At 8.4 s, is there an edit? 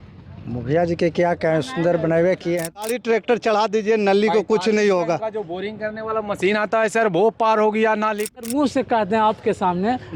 yes; 2 cuts; at 2.7 s, 8.4 s

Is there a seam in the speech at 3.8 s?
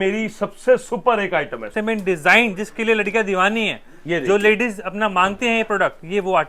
no; 1 cut; at 1.7 s

